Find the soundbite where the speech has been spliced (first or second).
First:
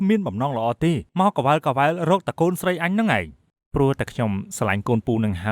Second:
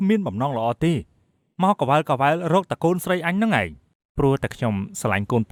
first